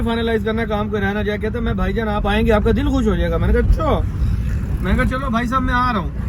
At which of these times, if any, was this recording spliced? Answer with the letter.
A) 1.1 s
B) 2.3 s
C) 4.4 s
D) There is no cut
D